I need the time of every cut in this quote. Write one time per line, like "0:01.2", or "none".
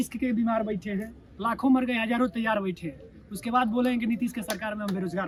none

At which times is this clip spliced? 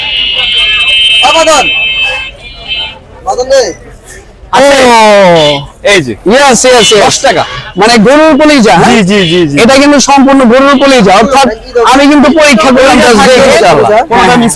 none

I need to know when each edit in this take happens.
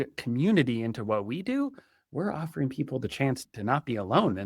0:03.4

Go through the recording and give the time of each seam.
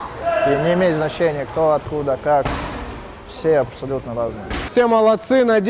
0:04.7

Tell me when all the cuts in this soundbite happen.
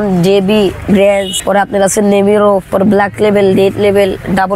0:01.3
0:02.7

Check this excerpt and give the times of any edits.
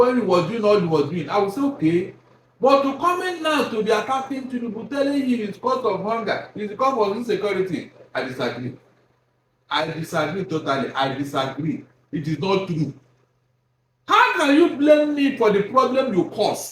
none

